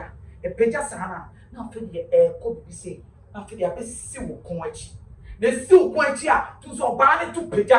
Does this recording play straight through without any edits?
yes; 0 cuts

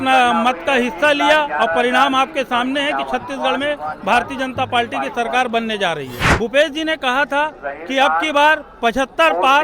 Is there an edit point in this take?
yes; 1 cut; at 6.2 s

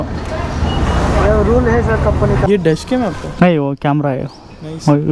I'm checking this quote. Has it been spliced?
yes; 1 cut; at 2.5 s

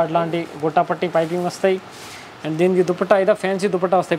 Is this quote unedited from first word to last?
yes; 0 cuts

